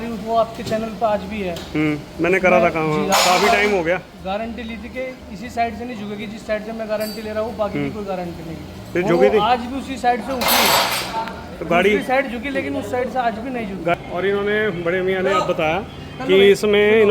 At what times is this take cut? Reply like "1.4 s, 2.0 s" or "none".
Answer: 14.0 s